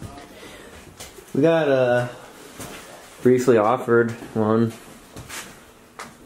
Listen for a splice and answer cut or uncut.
uncut